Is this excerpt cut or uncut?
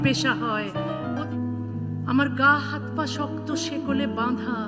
cut